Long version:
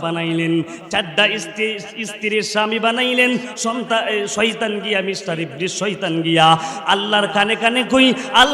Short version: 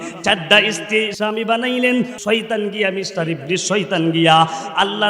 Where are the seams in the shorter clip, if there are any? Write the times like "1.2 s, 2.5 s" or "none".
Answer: 1.1 s, 2.2 s